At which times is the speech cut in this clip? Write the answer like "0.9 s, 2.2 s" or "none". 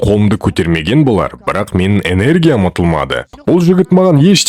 3.3 s